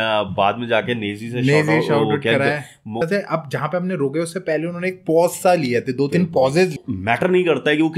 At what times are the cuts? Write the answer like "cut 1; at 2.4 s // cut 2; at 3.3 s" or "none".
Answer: cut 1; at 3.0 s // cut 2; at 6.8 s